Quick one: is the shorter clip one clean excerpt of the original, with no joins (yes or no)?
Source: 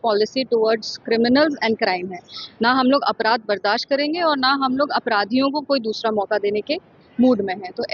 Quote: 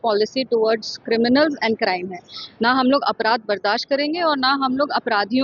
yes